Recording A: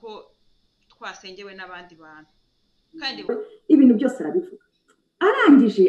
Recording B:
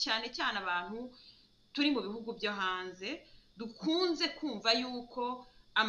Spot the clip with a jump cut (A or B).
A